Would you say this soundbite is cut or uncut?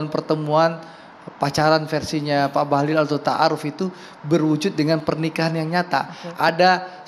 uncut